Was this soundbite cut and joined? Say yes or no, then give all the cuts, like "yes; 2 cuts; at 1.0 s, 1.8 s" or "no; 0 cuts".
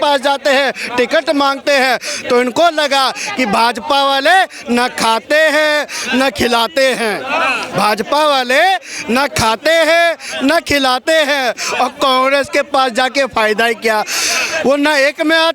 no; 0 cuts